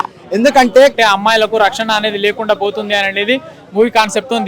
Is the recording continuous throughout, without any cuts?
no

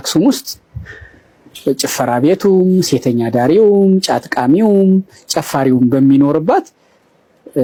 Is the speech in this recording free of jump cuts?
yes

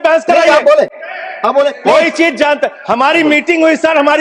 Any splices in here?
no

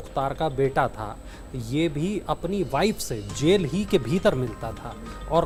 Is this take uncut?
yes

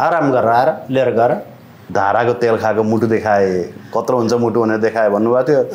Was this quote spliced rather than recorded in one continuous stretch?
yes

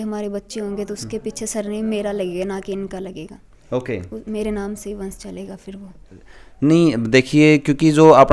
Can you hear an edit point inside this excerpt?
no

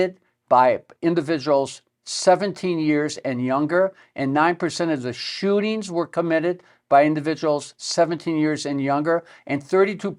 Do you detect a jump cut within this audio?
no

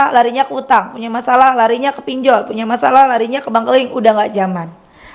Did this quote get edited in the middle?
no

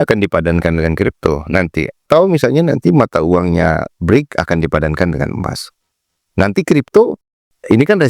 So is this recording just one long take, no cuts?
no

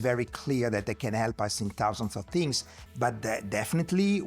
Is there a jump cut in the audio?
yes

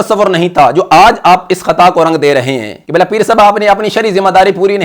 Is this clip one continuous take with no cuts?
no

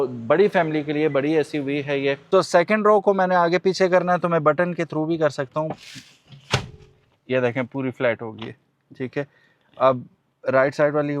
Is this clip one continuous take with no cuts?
no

